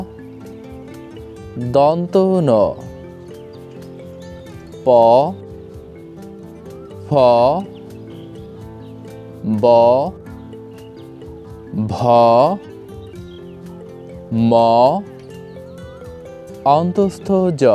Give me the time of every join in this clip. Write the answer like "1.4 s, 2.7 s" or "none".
3.3 s, 4.8 s